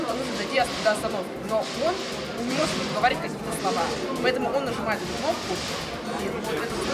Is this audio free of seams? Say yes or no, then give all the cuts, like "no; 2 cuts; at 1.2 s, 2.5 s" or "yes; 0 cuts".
yes; 0 cuts